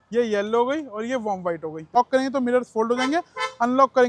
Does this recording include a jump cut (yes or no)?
yes